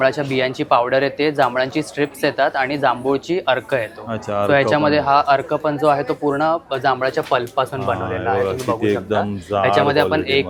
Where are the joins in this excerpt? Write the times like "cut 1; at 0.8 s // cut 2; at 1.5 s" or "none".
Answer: none

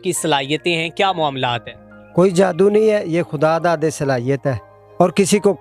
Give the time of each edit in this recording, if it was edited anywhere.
none

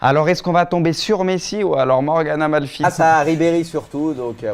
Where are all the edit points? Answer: none

